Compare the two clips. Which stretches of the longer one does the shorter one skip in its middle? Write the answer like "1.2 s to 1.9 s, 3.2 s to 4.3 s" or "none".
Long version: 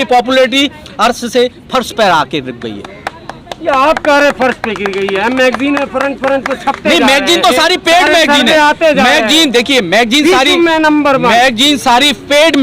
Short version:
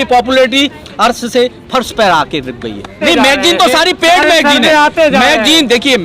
3.0 s to 6.8 s

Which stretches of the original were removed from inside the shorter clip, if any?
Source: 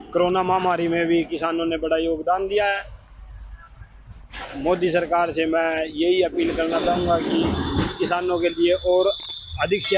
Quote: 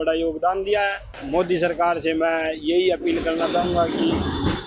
2.9 s to 4.4 s

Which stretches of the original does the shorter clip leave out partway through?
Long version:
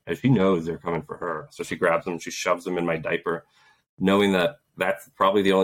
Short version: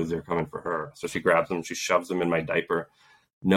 none

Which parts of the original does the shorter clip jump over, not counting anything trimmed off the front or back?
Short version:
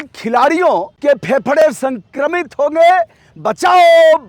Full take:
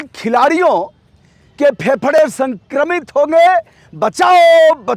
0.9 s to 1.5 s

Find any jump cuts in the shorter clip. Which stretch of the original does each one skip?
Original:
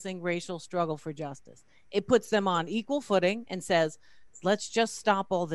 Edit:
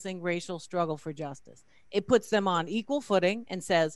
none

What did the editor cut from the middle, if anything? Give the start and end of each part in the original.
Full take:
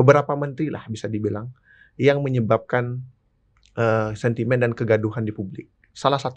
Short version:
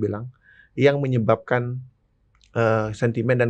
none

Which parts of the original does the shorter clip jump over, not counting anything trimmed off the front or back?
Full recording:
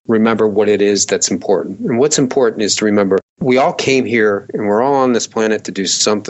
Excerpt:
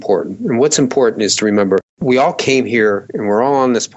none

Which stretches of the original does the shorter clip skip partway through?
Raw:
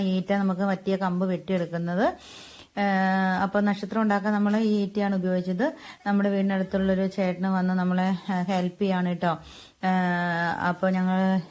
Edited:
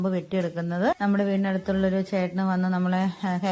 2.1 s to 6.0 s

